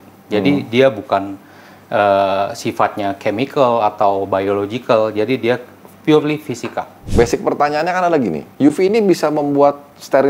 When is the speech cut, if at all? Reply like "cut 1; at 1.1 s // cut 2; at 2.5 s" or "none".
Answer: cut 1; at 7.0 s